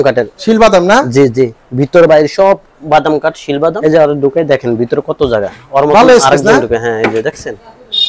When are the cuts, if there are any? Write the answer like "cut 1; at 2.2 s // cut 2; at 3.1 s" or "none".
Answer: cut 1; at 3.8 s